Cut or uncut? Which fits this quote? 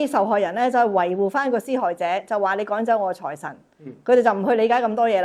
uncut